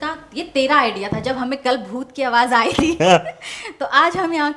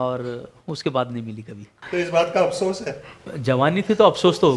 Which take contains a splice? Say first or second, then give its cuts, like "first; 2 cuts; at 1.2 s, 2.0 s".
second; 2 cuts; at 1.7 s, 3.2 s